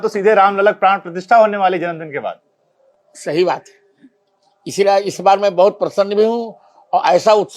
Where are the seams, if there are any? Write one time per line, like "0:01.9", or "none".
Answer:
none